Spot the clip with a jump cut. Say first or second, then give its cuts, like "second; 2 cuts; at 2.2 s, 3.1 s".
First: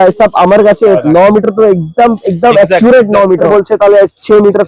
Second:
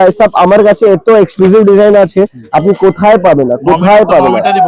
first; 2 cuts; at 1.0 s, 3.5 s